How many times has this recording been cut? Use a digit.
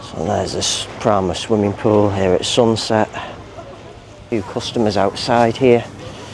1